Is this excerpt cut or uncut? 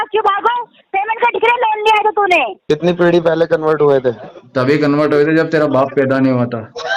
cut